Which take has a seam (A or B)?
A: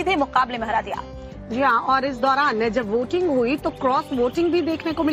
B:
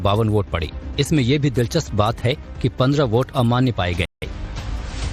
A